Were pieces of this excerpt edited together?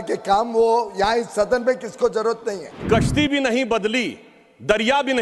yes; 1 cut; at 2.8 s

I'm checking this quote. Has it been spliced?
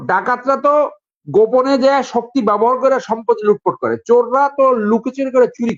no; 0 cuts

